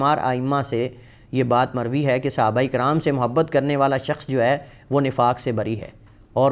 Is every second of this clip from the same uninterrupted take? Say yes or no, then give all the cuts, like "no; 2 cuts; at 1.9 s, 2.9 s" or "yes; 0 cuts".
yes; 0 cuts